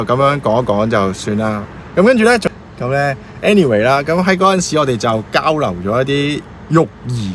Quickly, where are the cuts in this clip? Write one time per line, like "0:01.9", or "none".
0:02.5